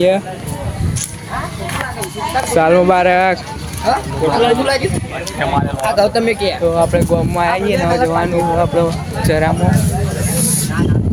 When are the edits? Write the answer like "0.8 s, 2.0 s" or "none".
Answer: none